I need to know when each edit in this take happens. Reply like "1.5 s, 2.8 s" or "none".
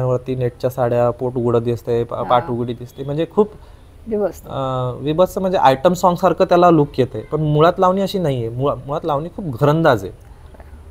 none